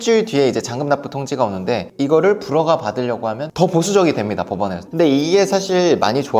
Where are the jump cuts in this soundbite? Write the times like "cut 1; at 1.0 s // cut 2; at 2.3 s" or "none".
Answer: cut 1; at 1.9 s // cut 2; at 3.5 s // cut 3; at 4.8 s